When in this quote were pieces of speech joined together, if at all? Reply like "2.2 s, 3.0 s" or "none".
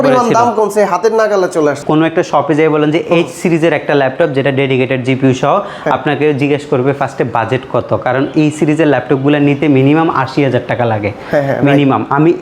none